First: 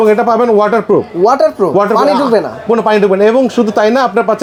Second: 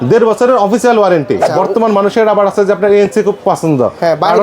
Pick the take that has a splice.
second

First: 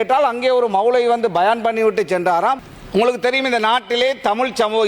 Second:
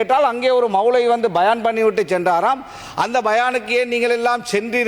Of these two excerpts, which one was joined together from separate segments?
first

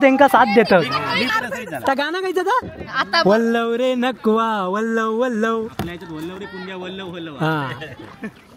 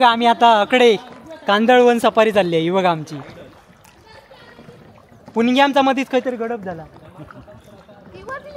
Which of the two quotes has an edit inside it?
first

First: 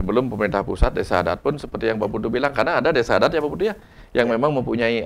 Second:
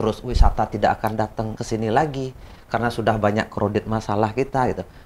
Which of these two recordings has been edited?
second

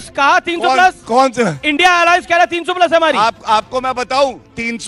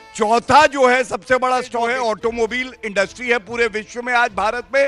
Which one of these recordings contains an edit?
second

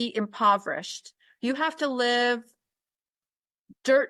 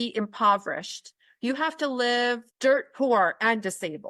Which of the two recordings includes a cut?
second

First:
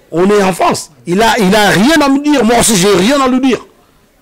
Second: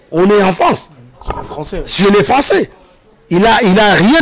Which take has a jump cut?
first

